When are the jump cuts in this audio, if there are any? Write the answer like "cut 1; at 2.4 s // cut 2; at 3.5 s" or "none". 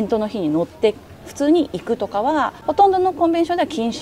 cut 1; at 2.6 s